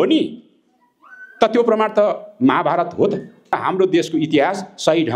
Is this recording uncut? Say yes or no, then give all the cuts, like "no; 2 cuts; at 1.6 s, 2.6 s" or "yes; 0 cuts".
no; 1 cut; at 3.6 s